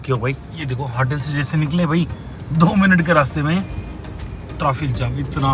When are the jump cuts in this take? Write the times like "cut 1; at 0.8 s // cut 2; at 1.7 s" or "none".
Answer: none